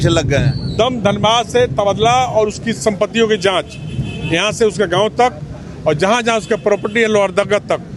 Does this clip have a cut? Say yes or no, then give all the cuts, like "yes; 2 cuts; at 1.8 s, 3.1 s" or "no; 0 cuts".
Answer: no; 0 cuts